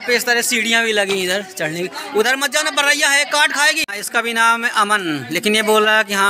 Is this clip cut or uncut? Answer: cut